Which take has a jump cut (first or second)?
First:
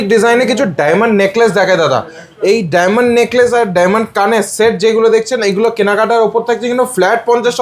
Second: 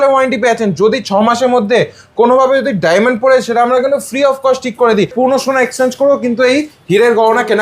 second